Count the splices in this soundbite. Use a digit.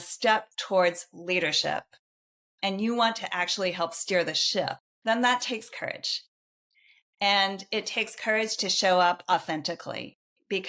1